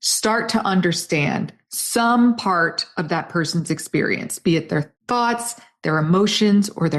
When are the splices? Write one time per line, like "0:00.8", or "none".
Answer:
0:05.0